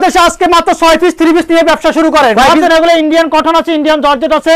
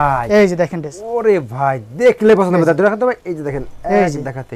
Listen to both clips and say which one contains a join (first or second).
first